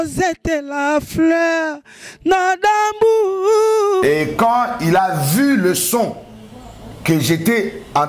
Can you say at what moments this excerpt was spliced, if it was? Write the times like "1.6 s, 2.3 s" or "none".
4.0 s